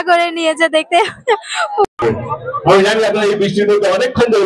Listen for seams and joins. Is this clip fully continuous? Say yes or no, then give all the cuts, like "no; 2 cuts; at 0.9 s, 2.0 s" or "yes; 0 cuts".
no; 1 cut; at 1.8 s